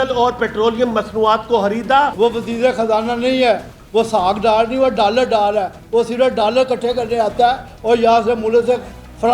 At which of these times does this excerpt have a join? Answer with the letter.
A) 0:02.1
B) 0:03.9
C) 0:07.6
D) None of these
A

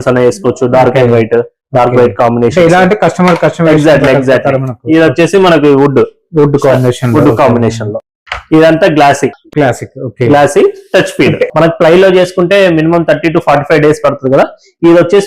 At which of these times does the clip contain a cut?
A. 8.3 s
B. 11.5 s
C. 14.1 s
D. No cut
B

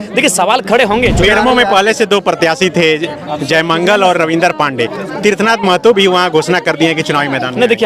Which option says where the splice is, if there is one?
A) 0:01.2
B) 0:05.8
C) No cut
A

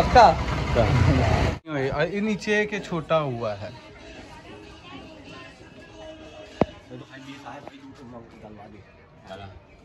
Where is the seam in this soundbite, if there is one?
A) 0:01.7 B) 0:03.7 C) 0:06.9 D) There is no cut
A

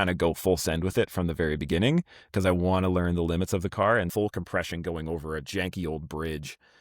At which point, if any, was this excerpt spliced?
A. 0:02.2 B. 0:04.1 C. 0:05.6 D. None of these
B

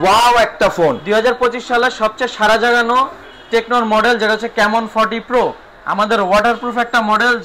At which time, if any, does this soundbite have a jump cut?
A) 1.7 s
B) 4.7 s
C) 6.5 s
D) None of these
D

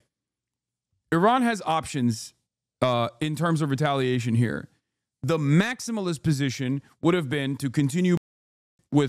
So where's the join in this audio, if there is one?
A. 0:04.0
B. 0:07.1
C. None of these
C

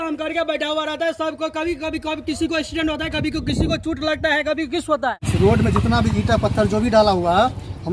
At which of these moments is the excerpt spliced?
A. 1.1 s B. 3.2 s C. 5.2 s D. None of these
C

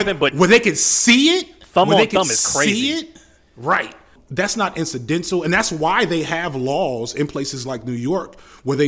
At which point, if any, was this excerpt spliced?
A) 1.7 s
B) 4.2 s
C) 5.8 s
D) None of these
B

